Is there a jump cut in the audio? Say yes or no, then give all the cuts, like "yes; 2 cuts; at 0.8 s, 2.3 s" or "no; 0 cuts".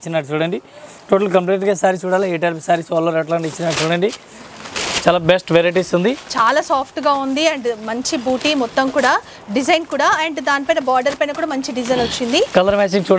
no; 0 cuts